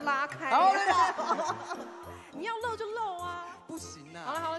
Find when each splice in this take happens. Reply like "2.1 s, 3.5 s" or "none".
none